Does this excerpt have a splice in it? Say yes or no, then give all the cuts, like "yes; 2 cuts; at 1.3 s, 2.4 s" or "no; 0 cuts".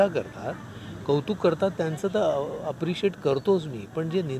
no; 0 cuts